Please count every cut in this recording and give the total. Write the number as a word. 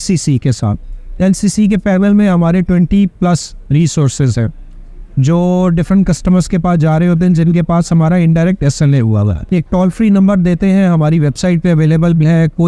one